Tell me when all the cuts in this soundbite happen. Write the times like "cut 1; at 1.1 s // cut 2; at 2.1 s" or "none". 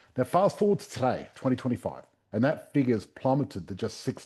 none